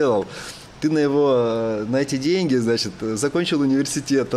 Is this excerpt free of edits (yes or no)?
yes